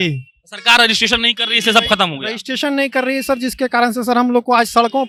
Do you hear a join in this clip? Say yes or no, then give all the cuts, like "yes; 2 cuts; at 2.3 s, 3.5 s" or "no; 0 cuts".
no; 0 cuts